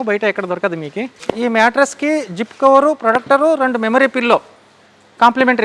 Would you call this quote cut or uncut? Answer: cut